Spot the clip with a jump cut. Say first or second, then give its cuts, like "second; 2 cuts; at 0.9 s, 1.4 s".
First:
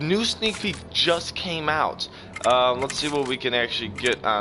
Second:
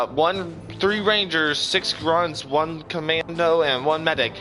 second; 1 cut; at 2.8 s